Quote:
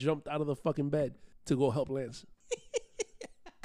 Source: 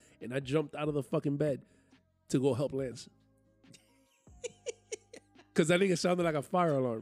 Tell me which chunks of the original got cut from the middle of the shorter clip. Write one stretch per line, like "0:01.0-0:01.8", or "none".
0:01.7-0:02.1
0:03.1-0:04.2